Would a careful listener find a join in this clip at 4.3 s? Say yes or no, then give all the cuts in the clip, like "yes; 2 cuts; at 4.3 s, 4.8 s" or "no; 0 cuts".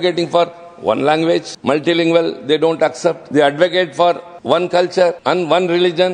yes; 4 cuts; at 1.5 s, 3.2 s, 4.3 s, 5.2 s